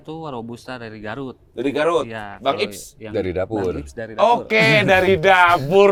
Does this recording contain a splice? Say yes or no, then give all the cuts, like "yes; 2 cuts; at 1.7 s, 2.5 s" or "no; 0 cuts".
no; 0 cuts